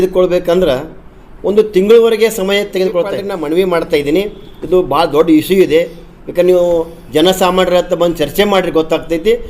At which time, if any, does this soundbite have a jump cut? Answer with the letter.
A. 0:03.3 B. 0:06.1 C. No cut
A